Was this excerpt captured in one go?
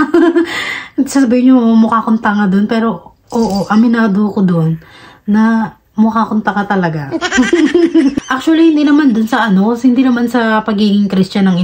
no; 1 cut; at 8.1 s

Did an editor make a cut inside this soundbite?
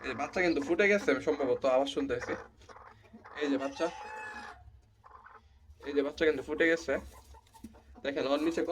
no; 0 cuts

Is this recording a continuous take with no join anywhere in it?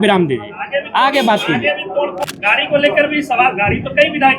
no; 1 cut; at 2.2 s

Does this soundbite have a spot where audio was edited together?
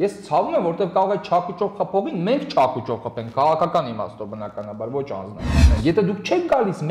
yes; 1 cut; at 5.7 s

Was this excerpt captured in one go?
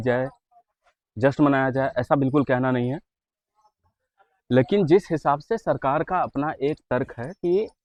yes; 0 cuts

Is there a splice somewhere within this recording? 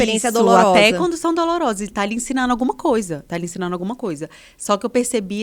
no; 0 cuts

